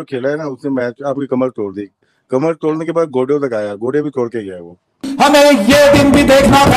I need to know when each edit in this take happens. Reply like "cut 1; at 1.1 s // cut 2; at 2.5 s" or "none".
none